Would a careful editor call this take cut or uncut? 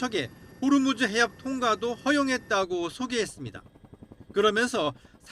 uncut